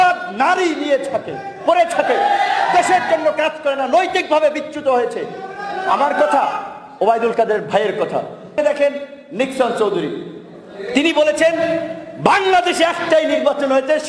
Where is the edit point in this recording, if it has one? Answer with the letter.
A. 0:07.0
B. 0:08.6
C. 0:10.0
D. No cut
B